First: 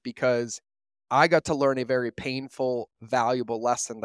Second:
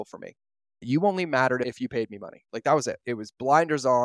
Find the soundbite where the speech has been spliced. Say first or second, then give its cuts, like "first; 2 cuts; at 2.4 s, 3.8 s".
second; 3 cuts; at 0.8 s, 1.7 s, 3.0 s